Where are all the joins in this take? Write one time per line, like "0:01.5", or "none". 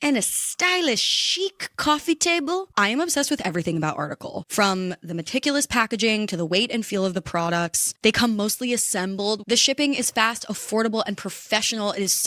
0:02.7
0:09.4